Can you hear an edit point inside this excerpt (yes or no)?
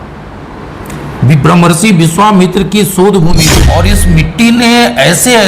yes